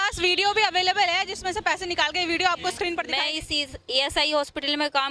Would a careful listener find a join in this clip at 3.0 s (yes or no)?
yes